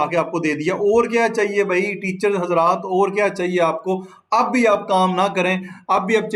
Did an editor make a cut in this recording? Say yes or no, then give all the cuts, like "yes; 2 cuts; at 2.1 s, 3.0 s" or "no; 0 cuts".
no; 0 cuts